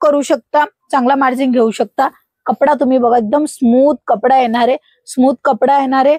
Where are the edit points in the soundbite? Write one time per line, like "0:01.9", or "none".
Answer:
none